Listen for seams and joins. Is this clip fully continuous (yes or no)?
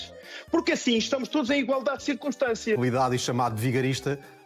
no